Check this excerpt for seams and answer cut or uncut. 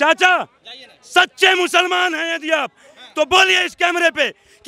uncut